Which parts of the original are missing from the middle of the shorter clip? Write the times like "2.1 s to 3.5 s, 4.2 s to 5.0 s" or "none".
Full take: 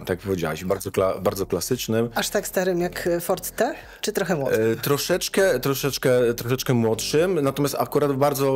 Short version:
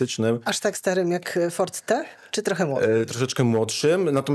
4.8 s to 6.4 s